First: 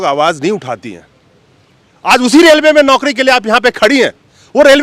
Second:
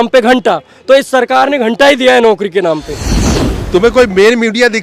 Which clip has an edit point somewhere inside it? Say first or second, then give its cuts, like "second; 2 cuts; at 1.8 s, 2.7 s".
second; 1 cut; at 3.2 s